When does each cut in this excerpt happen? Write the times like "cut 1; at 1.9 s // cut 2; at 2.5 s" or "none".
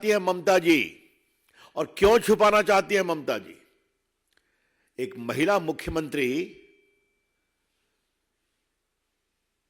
none